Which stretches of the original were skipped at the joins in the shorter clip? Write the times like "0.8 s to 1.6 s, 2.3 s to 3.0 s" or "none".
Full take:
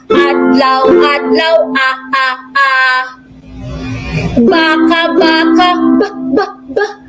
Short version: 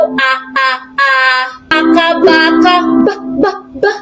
3.3 s to 4.7 s